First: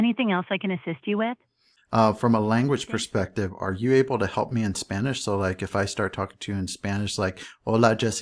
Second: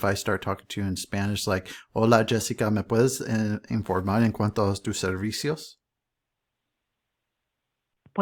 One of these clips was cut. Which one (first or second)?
first